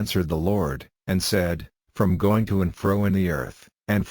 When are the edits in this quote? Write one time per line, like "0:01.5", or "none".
0:01.8